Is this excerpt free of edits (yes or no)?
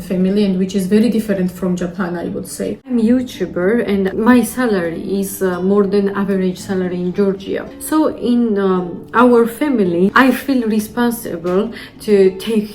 no